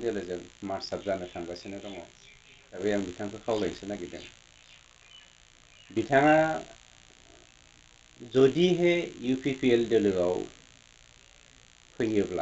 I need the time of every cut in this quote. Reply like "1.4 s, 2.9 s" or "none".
2.8 s